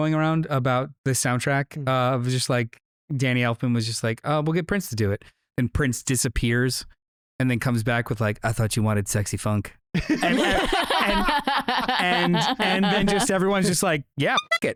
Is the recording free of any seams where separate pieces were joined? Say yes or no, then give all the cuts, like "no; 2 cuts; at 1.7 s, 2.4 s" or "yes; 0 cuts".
yes; 0 cuts